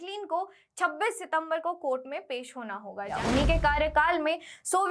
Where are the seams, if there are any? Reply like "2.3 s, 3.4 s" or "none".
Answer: 3.1 s

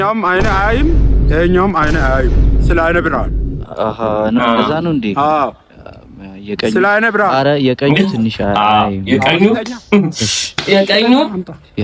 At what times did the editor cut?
none

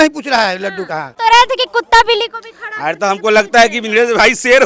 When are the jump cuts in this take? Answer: 1.0 s

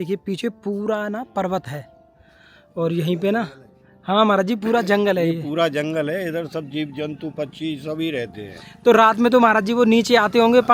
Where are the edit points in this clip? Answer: none

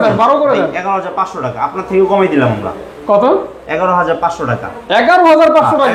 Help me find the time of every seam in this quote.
none

